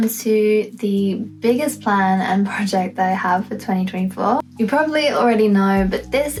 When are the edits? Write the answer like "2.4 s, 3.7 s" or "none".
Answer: none